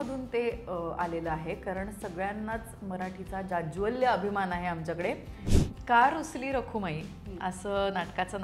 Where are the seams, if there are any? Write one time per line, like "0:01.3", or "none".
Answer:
0:05.4